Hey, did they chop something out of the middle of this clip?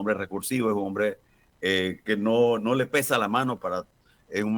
no; 0 cuts

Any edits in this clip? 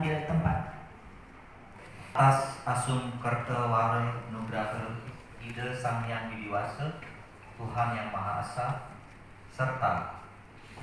yes; 1 cut; at 2.2 s

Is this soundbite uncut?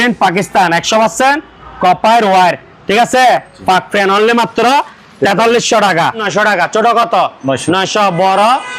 no; 1 cut; at 6.3 s

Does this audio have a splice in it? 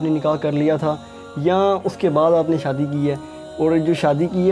no; 0 cuts

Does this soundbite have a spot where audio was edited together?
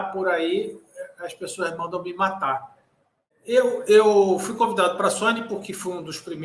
yes; 1 cut; at 3.4 s

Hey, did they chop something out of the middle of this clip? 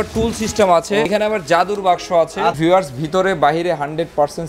yes; 2 cuts; at 1.1 s, 2.6 s

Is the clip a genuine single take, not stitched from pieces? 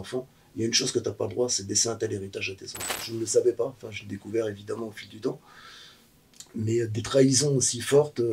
no; 1 cut; at 3.0 s

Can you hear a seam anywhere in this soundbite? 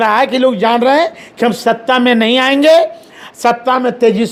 no; 0 cuts

